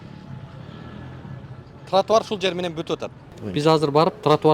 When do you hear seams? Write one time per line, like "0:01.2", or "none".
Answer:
0:03.4